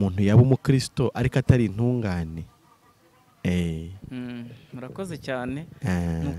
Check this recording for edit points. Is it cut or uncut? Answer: uncut